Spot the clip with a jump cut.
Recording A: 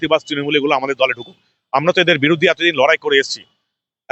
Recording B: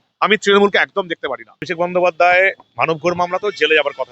B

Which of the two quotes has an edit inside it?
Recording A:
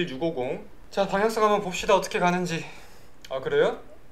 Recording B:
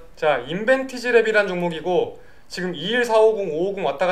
A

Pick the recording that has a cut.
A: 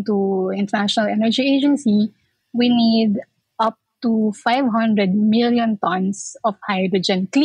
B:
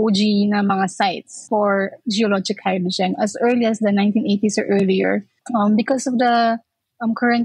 B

